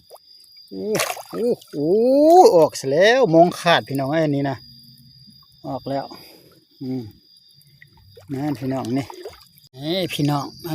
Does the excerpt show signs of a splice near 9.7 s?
yes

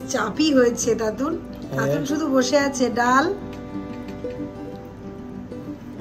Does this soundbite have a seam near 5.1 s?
no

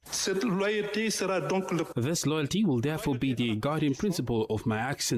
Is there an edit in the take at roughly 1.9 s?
yes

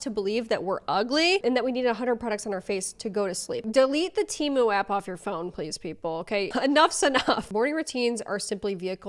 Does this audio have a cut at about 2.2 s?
no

